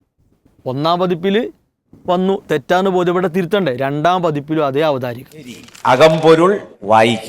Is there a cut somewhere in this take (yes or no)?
yes